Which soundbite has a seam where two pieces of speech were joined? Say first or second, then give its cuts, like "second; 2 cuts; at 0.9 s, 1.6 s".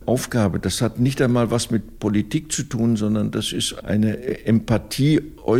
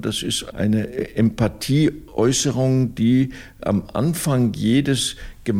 second; 1 cut; at 3.6 s